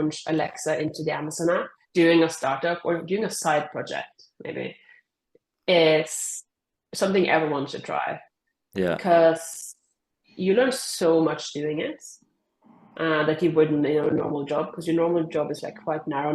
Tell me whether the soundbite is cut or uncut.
cut